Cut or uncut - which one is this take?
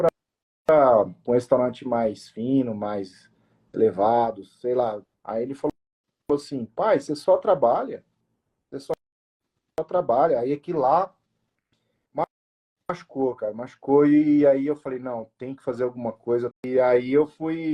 cut